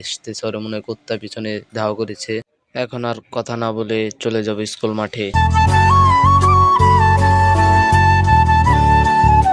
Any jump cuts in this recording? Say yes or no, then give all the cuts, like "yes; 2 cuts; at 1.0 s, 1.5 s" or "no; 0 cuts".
no; 0 cuts